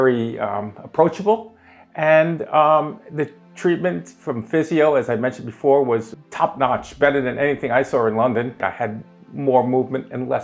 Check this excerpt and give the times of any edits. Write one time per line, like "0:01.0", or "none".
0:06.1
0:08.6